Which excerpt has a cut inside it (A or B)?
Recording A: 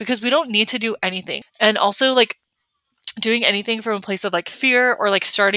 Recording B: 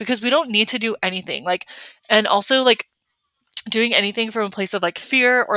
A